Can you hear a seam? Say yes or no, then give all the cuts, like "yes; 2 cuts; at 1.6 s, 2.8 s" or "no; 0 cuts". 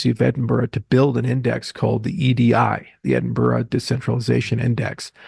no; 0 cuts